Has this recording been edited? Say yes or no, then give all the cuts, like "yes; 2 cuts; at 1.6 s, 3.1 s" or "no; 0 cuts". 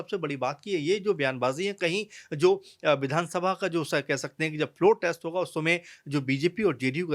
no; 0 cuts